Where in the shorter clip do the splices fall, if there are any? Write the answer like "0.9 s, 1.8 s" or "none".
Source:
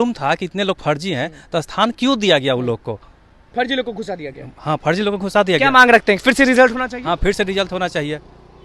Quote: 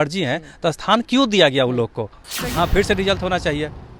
2.4 s